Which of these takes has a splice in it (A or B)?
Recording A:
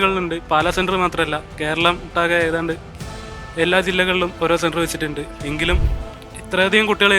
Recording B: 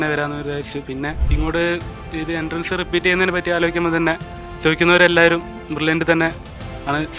B